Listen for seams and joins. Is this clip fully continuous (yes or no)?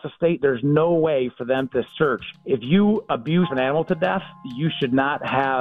no